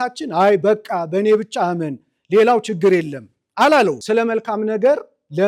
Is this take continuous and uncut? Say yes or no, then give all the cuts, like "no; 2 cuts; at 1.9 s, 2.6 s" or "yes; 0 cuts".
no; 1 cut; at 4.0 s